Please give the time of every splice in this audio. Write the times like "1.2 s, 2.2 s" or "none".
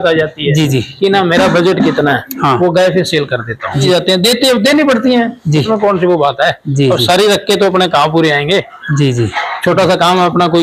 2.3 s, 3.8 s